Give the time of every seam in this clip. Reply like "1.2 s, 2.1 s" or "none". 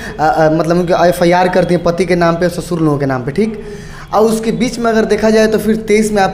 none